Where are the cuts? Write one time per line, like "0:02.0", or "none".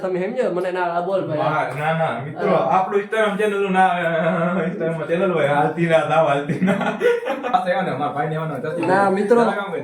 0:07.5

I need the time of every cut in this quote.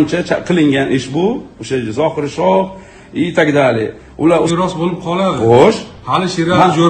0:04.5

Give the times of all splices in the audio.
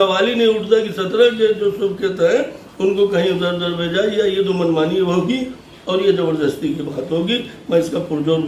none

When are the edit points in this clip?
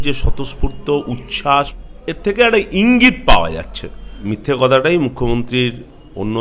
0:01.8
0:04.3

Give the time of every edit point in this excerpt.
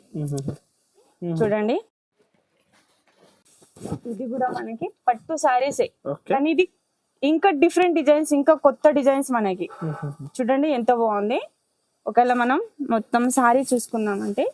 0:01.1

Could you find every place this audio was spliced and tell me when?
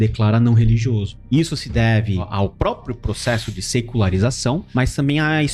0:01.1
0:02.3
0:04.7

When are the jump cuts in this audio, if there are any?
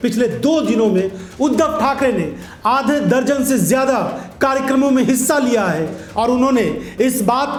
none

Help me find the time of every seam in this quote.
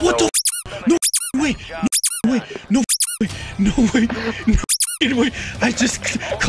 none

